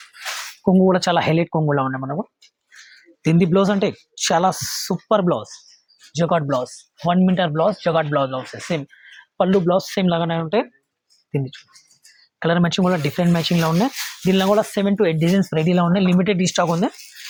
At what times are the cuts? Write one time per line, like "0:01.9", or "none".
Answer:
none